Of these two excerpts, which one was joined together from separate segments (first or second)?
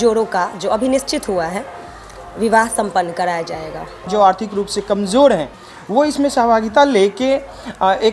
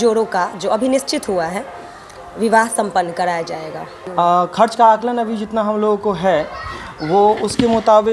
first